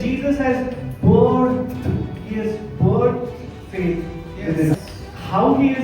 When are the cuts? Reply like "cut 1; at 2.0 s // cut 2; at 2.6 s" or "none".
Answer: cut 1; at 4.7 s